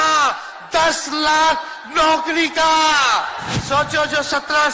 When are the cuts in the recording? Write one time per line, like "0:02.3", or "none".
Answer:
0:03.5